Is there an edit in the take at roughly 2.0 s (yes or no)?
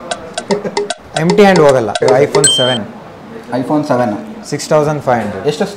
yes